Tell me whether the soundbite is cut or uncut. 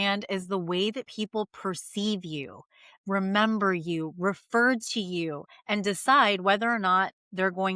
uncut